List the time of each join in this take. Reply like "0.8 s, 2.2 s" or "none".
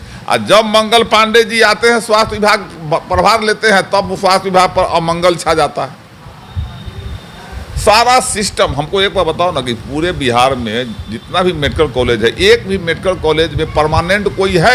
none